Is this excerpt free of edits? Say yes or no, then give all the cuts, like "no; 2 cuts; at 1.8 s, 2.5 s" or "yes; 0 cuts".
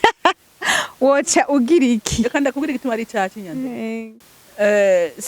no; 1 cut; at 4.0 s